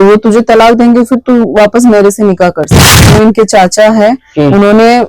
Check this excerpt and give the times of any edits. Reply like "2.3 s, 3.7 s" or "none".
3.1 s